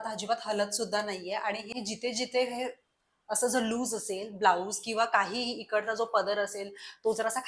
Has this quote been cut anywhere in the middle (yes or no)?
no